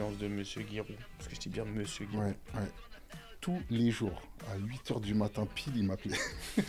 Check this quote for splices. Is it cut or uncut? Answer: cut